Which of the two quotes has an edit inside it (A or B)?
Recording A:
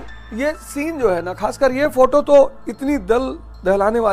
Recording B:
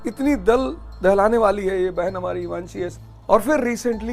B